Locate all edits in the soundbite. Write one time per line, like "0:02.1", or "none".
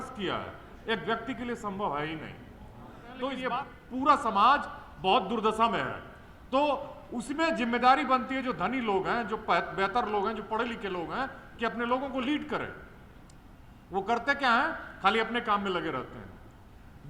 0:03.4